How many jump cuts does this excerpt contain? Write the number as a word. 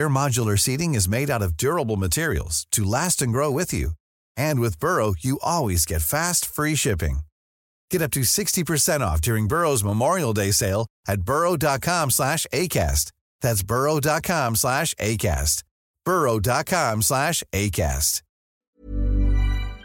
one